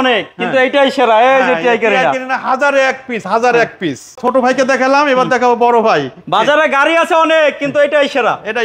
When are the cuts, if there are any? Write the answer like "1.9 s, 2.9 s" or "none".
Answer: none